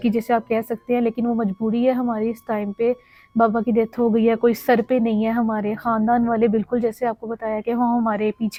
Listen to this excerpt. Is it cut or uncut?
uncut